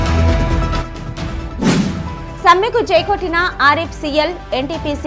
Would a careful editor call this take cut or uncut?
cut